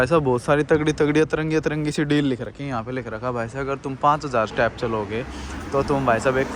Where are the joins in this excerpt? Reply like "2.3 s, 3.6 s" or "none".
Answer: none